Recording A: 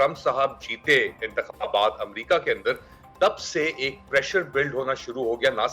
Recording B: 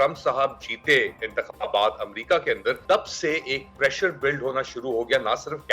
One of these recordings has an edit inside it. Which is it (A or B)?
B